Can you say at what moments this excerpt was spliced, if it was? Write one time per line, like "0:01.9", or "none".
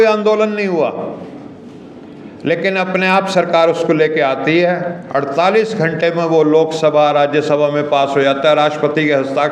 none